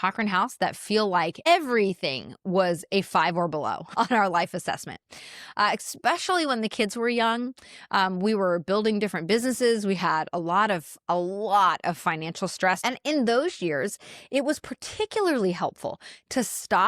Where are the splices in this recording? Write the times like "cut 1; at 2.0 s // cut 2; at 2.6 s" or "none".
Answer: cut 1; at 1.5 s // cut 2; at 3.9 s // cut 3; at 12.8 s